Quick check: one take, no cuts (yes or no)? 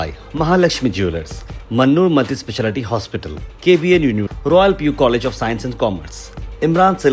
yes